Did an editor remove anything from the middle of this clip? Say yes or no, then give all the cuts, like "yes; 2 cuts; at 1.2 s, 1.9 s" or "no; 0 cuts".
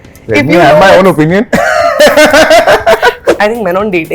yes; 1 cut; at 3.2 s